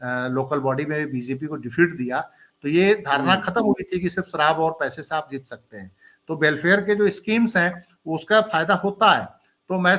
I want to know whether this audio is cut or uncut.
uncut